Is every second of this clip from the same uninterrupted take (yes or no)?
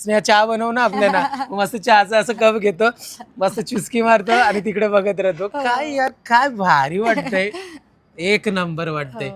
yes